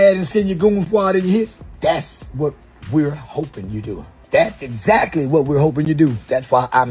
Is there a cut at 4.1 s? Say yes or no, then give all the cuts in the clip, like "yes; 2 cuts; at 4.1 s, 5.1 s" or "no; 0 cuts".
yes; 2 cuts; at 1.6 s, 4.1 s